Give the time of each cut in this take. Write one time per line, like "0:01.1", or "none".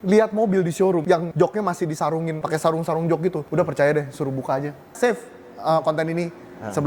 0:01.2
0:02.4
0:03.4
0:04.9